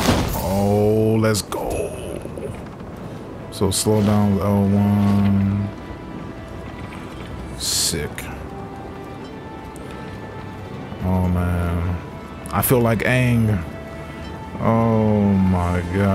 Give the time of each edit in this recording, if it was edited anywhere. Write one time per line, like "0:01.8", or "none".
none

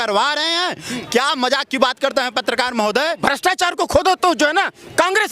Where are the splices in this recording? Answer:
0:03.2

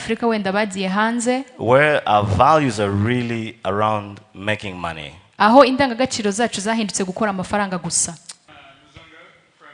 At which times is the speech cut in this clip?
0:08.5

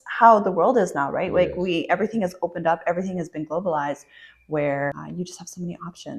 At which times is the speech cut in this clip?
0:05.0

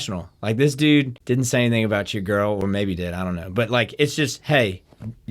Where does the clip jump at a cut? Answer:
0:01.2

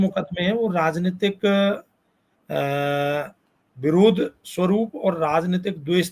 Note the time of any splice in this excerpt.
none

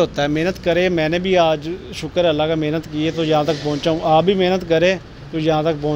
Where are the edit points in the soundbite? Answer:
none

